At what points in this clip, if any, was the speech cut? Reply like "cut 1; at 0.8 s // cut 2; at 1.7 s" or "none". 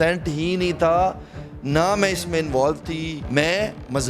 cut 1; at 3.2 s